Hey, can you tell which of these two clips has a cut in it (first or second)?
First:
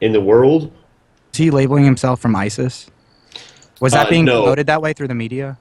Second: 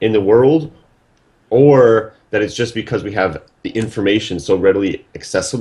second